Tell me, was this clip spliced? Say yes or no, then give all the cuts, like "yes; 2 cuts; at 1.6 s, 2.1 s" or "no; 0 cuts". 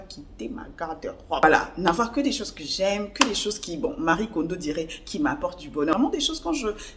yes; 2 cuts; at 1.4 s, 5.9 s